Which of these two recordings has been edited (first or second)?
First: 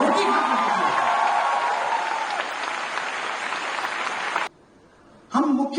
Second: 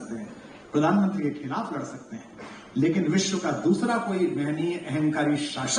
first